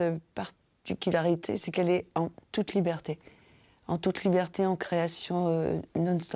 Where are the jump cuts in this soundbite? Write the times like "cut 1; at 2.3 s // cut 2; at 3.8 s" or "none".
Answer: none